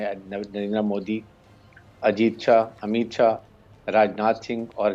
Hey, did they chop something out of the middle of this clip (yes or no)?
no